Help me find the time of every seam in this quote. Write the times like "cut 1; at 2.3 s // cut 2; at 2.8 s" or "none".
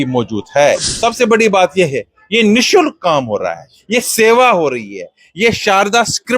cut 1; at 0.9 s